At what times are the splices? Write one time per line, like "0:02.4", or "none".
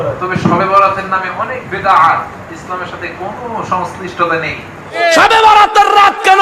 0:04.9